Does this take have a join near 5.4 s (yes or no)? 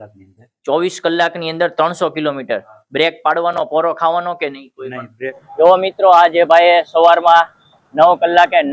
yes